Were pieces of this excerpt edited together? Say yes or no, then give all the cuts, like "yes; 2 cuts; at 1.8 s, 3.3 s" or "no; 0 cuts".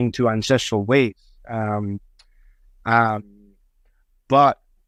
no; 0 cuts